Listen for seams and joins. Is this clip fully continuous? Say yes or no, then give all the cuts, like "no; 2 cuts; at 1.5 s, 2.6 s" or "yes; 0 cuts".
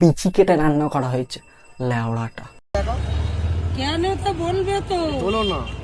no; 1 cut; at 2.7 s